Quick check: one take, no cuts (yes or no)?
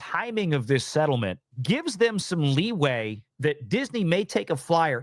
no